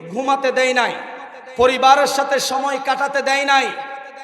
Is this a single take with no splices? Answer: yes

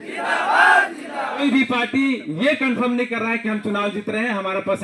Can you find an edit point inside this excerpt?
yes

